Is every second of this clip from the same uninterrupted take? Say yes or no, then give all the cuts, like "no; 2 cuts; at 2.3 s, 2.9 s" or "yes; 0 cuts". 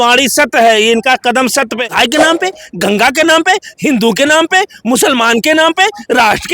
no; 1 cut; at 1.8 s